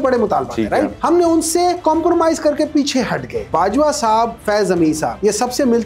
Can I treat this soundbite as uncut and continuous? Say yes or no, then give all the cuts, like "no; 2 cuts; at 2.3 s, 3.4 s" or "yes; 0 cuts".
no; 4 cuts; at 1.0 s, 1.8 s, 3.4 s, 4.4 s